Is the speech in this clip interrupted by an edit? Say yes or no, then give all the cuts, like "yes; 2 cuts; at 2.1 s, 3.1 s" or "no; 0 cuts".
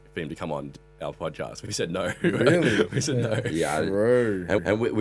no; 0 cuts